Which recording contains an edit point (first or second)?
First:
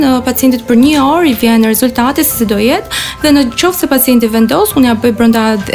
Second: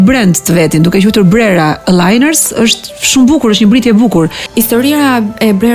second